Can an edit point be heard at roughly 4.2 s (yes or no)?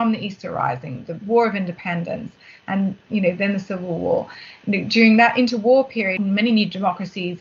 no